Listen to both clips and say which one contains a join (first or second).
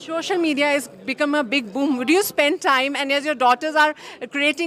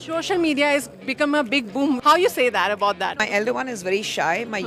second